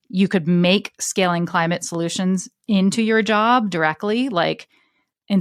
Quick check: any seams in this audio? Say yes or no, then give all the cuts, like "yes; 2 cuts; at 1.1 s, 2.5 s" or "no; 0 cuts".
no; 0 cuts